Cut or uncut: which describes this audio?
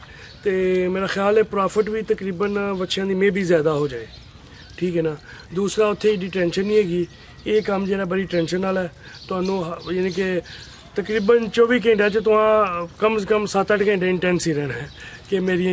uncut